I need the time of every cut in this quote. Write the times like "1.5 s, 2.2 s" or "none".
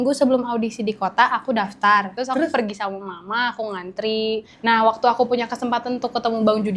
2.2 s, 4.5 s